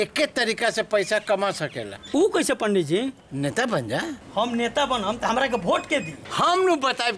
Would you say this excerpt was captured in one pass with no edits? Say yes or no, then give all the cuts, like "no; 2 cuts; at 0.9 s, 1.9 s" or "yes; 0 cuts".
no; 2 cuts; at 4.2 s, 6.2 s